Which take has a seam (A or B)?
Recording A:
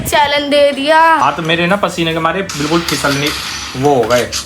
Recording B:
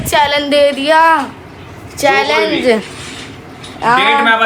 A